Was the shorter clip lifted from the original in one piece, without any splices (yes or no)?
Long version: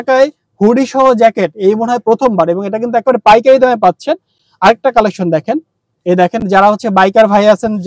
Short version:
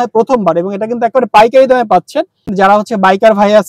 no